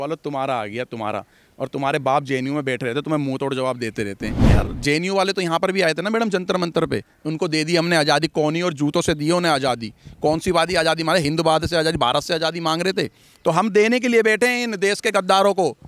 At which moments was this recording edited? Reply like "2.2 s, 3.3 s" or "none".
4.5 s

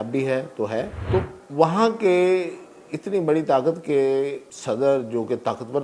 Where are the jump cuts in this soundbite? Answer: 1.0 s, 4.5 s

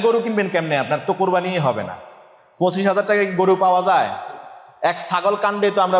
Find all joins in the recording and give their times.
none

